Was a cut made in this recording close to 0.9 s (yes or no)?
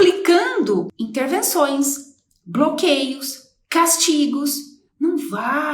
yes